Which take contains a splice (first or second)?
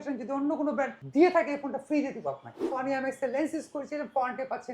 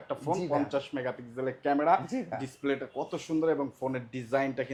first